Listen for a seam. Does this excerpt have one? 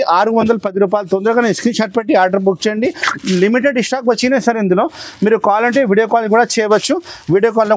no; 0 cuts

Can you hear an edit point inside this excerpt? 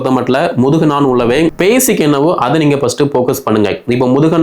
yes; 1 cut; at 1.5 s

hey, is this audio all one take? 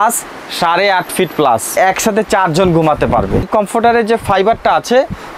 no; 2 cuts; at 1.8 s, 3.4 s

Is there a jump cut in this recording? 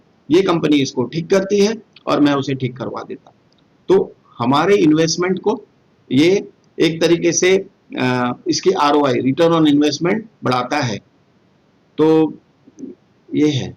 no; 0 cuts

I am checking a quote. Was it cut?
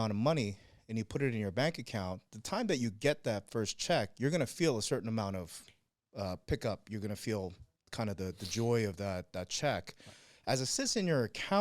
no; 0 cuts

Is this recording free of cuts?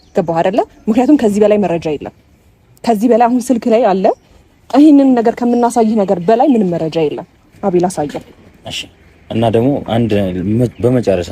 no; 1 cut; at 7.5 s

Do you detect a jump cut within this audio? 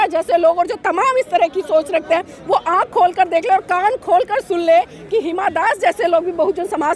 no; 0 cuts

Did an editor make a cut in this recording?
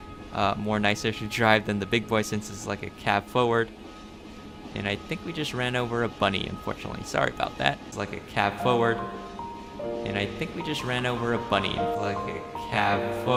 no; 0 cuts

